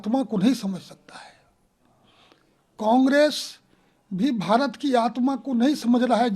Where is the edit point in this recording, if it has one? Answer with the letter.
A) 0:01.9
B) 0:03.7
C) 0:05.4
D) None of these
D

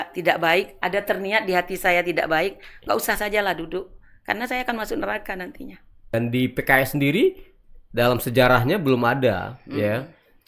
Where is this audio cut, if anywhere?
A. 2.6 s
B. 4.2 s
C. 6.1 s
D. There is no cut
C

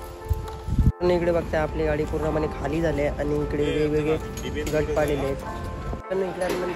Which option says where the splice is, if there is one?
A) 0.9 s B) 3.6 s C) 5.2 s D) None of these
A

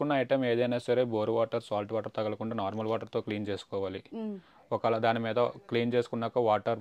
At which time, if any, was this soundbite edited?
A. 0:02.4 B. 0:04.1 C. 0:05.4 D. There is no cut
D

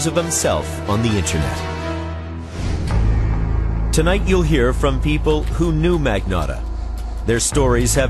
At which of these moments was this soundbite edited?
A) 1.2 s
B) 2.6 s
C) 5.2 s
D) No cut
D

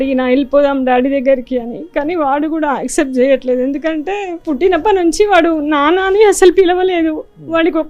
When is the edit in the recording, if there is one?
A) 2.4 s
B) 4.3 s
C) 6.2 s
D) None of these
B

